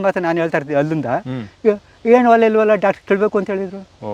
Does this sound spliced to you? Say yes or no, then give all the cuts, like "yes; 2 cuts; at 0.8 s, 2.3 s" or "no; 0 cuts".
no; 0 cuts